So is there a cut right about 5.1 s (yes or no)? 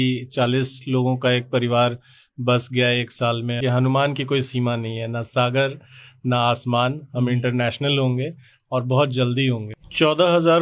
no